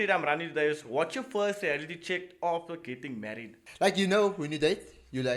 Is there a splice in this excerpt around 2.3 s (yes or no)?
no